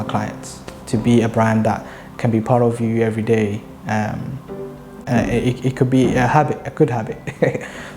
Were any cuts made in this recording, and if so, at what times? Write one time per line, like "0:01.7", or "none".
0:05.0